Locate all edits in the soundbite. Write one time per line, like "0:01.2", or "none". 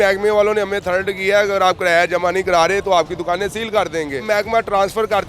0:04.2